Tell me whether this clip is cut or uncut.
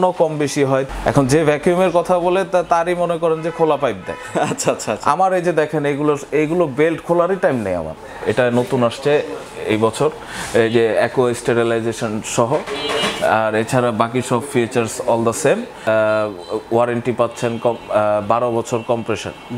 cut